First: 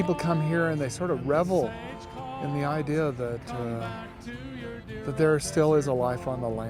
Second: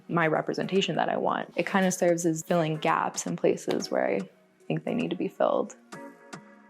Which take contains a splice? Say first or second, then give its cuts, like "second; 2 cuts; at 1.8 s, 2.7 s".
second; 1 cut; at 1.5 s